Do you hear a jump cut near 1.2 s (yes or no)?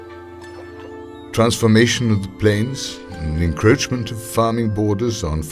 yes